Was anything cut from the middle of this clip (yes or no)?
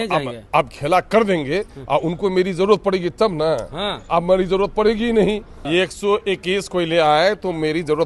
yes